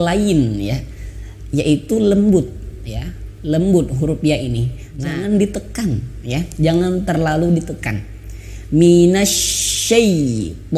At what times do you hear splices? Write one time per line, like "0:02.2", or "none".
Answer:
0:05.1